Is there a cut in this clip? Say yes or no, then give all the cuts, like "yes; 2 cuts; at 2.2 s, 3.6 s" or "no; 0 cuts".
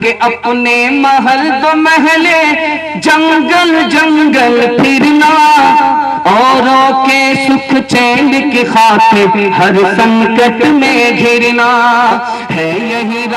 no; 0 cuts